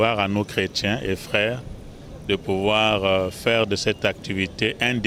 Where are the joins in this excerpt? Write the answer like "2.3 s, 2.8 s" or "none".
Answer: none